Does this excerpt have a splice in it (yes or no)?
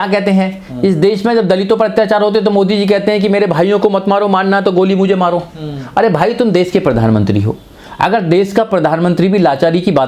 no